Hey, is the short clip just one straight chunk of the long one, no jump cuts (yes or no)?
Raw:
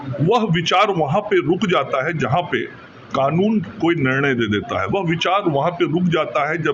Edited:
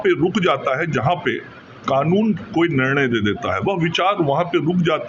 yes